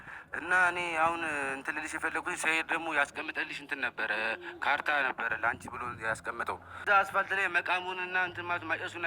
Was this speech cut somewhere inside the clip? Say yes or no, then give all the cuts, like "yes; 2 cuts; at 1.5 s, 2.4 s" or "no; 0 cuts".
yes; 1 cut; at 6.8 s